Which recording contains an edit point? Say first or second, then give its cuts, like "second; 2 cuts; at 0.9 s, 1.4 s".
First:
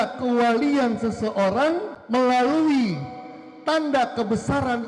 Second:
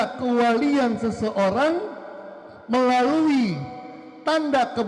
first; 1 cut; at 1.9 s